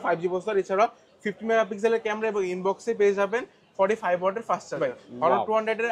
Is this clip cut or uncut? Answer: cut